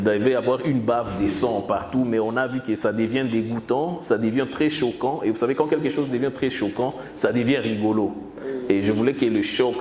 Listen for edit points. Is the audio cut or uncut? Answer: uncut